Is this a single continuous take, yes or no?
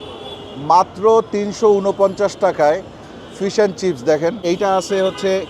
yes